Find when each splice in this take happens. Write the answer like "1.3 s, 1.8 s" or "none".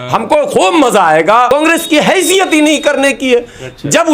1.5 s